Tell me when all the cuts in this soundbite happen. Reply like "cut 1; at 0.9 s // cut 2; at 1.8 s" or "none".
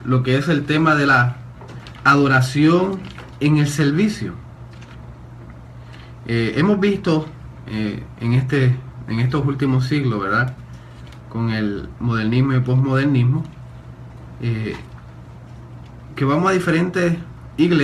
cut 1; at 12.6 s